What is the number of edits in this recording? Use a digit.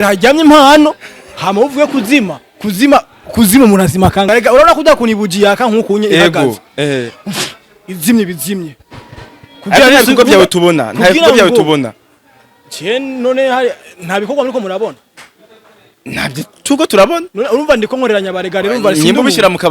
1